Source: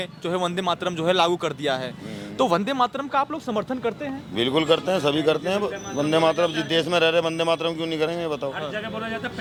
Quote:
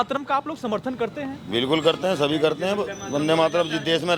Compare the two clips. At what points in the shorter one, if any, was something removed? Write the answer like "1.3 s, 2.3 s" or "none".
none